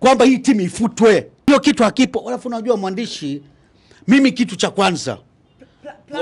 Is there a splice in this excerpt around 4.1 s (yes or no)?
no